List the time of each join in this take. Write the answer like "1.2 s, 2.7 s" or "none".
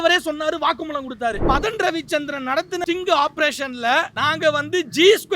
1.4 s, 2.8 s, 4.1 s